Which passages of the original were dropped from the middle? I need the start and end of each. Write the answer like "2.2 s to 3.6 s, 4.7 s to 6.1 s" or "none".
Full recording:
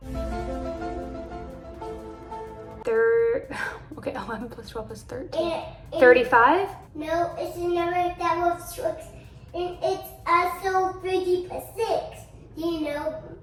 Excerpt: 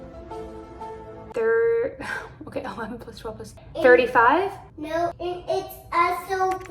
5.1 s to 5.7 s, 7.4 s to 9.5 s